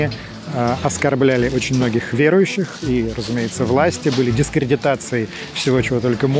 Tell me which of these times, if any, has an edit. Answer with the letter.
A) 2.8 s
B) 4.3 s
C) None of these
C